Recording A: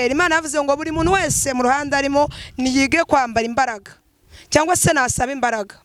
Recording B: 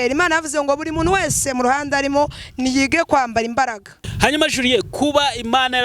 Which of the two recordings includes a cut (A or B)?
B